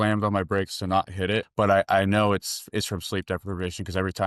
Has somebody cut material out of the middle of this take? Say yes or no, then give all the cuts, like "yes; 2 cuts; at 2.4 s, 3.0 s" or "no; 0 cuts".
yes; 1 cut; at 1.5 s